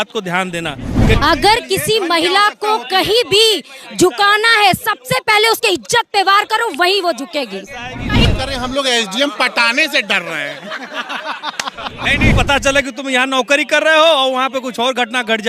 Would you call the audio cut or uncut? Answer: cut